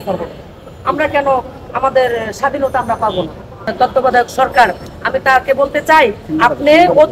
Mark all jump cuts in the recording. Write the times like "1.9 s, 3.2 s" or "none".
3.7 s